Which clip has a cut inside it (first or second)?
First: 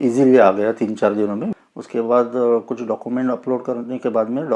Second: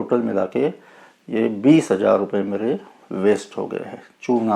first